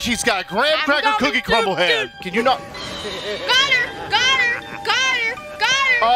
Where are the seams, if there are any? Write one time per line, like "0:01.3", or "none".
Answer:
0:02.1